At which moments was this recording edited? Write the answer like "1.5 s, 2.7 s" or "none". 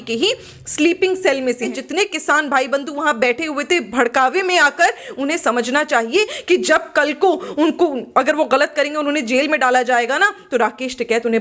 1.7 s